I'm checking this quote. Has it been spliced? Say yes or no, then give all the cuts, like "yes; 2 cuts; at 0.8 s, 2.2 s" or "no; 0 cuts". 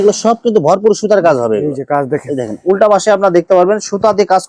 no; 0 cuts